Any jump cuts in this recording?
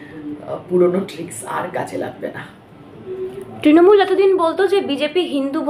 no; 0 cuts

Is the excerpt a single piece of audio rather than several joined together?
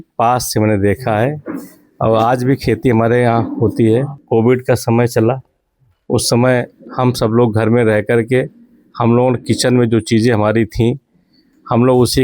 no; 1 cut; at 4.2 s

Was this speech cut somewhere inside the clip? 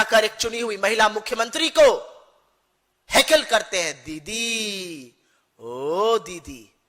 no; 0 cuts

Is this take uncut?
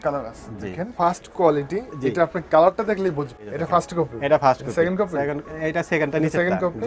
no; 2 cuts; at 0.9 s, 3.5 s

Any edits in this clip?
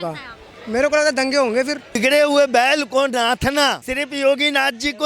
yes; 2 cuts; at 2.0 s, 3.8 s

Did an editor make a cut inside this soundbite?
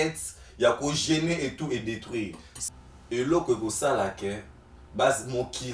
yes; 1 cut; at 2.6 s

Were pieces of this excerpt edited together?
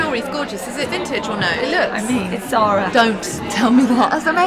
no; 0 cuts

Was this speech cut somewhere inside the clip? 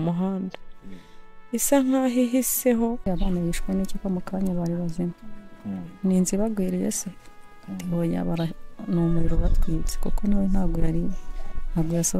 yes; 1 cut; at 3.0 s

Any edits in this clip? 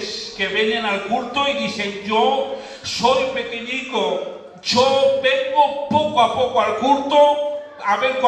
yes; 1 cut; at 4.9 s

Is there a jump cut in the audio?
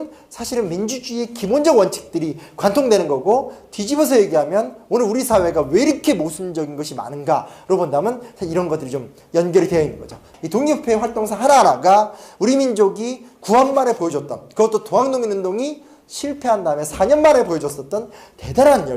yes; 1 cut; at 4.2 s

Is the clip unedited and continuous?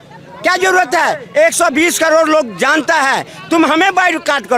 yes; 0 cuts

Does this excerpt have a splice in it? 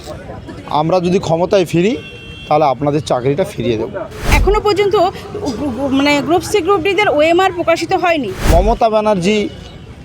yes; 2 cuts; at 4.3 s, 8.3 s

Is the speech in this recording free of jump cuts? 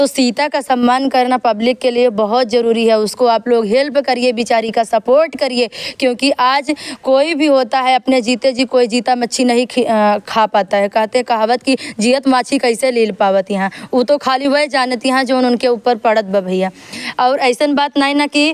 yes; 0 cuts

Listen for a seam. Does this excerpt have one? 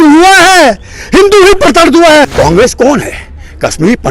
yes; 1 cut; at 2.3 s

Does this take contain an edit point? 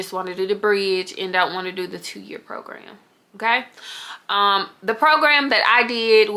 no; 0 cuts

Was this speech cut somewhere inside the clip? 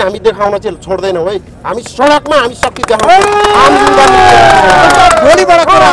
no; 0 cuts

